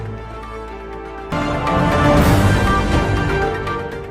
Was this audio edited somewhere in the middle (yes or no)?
yes